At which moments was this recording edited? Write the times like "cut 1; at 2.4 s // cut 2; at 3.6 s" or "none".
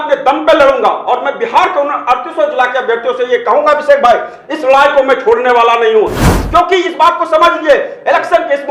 cut 1; at 6.3 s